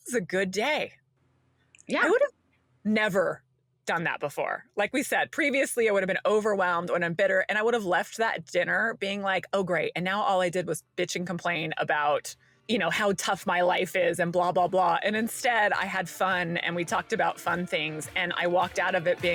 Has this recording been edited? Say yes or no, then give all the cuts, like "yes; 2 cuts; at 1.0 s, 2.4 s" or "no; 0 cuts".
no; 0 cuts